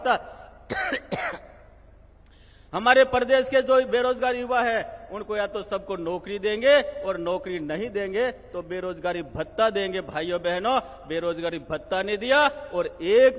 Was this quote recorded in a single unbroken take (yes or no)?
yes